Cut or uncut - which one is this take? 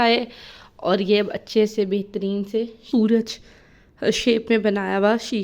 cut